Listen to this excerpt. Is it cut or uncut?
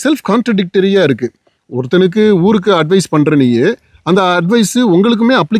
uncut